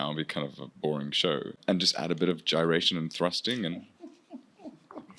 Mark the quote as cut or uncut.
cut